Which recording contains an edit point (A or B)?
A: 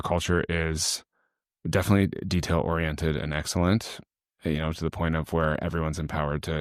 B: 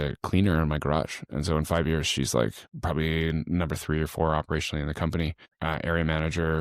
B